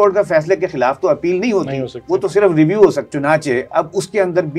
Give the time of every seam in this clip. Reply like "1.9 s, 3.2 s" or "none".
3.1 s